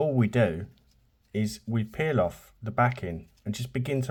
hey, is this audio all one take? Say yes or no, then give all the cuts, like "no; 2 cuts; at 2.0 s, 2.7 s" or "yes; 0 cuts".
yes; 0 cuts